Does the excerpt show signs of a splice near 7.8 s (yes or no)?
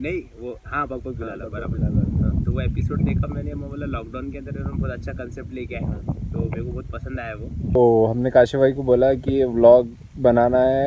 yes